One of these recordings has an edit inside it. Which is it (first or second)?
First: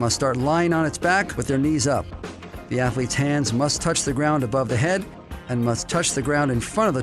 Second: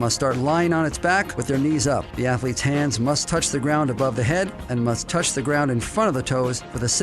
second